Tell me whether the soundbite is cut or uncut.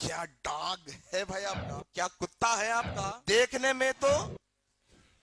cut